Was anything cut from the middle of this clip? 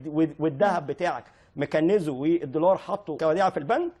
yes; 1 cut; at 3.1 s

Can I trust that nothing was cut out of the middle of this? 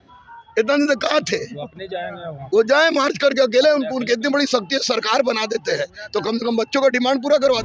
yes; 0 cuts

